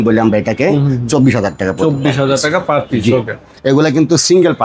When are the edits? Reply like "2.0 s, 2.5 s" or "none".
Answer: 3.5 s